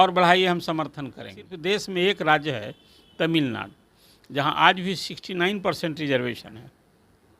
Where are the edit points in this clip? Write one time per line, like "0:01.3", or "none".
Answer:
0:01.5